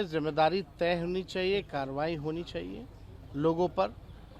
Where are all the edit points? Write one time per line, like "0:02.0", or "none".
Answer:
none